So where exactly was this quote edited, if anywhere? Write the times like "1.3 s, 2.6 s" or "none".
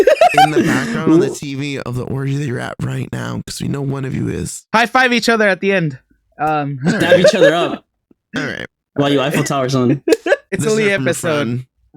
4.6 s, 10.5 s